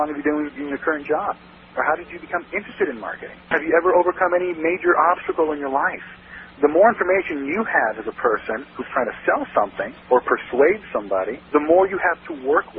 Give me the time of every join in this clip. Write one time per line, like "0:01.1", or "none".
none